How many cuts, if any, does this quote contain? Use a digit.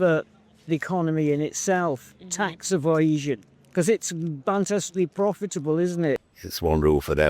1